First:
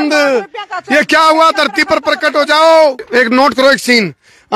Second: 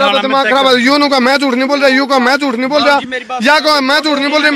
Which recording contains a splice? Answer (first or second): first